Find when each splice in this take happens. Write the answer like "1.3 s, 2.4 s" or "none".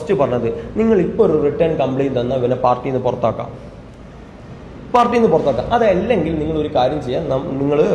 none